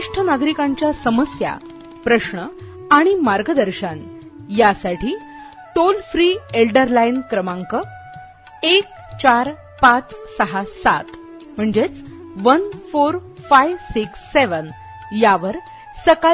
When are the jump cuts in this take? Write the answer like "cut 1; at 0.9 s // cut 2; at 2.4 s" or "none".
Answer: none